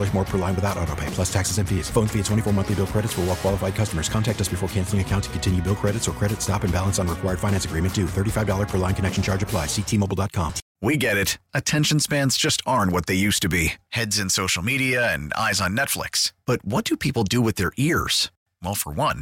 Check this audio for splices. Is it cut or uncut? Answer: cut